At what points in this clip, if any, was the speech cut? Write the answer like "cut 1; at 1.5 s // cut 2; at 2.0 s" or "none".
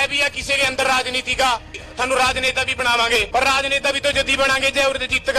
cut 1; at 1.7 s // cut 2; at 3.3 s